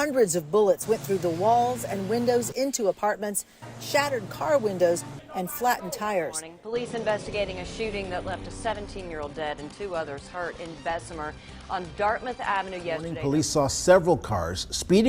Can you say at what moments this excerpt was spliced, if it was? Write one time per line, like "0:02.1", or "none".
0:06.5
0:13.1